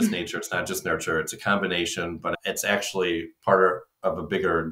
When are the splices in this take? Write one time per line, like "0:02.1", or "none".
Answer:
none

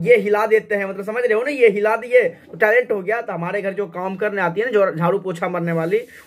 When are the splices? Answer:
0:02.3

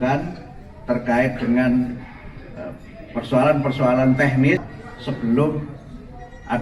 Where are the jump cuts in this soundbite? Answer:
0:04.7

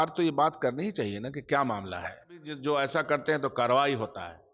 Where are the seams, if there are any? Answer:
0:02.5

